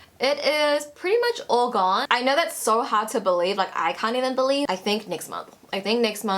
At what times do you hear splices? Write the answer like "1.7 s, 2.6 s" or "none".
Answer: 2.0 s, 4.7 s